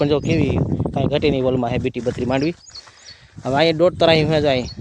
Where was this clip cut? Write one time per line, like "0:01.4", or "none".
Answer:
none